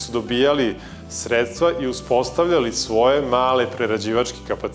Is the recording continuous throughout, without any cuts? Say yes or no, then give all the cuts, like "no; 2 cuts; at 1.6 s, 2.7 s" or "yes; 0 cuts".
yes; 0 cuts